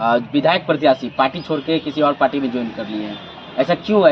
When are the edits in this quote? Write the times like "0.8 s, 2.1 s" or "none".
none